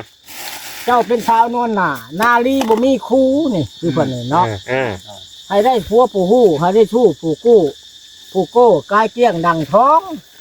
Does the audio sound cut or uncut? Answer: uncut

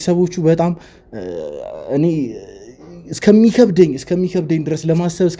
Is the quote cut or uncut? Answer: uncut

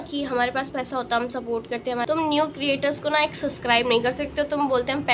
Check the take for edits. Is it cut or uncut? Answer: cut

